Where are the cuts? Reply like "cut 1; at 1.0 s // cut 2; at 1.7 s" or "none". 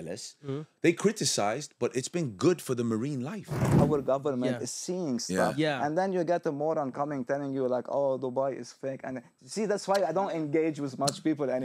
cut 1; at 3.7 s